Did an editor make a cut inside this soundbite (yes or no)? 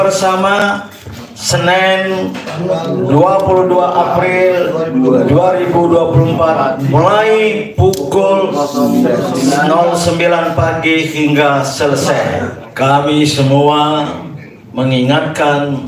yes